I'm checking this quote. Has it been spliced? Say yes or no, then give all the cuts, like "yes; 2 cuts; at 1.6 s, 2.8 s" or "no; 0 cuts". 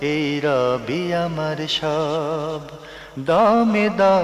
yes; 1 cut; at 2.5 s